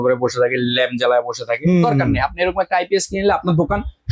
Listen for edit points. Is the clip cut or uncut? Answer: uncut